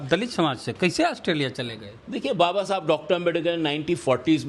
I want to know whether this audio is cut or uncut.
uncut